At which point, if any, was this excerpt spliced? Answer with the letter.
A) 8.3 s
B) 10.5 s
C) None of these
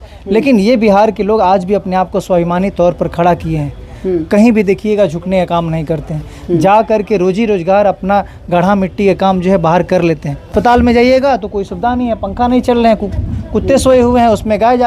B